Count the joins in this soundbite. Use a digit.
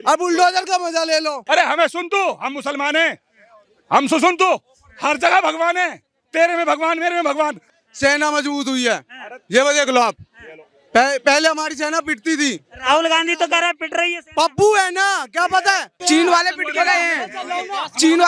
3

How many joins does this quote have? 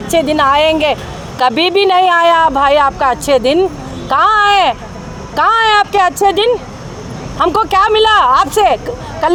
0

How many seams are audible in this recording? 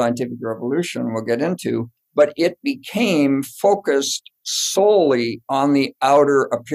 1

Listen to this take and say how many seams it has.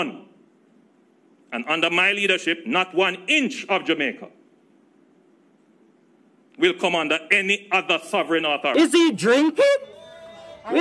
1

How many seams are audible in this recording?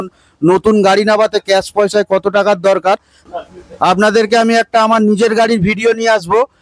1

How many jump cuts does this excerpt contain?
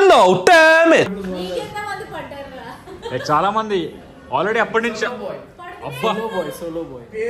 1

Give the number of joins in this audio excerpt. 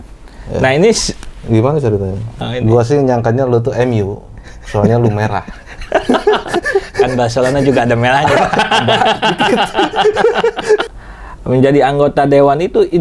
2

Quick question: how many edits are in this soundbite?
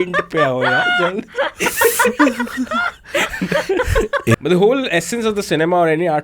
1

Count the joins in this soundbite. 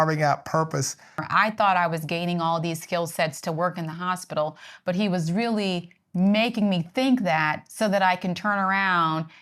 1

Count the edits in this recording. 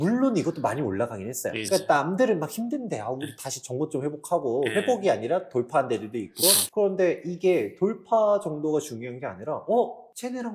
2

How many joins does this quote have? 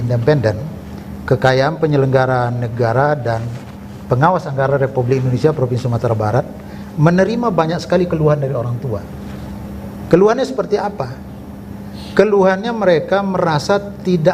0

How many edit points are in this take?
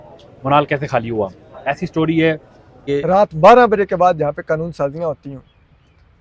1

